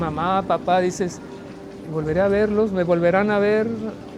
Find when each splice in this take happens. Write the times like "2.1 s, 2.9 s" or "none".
none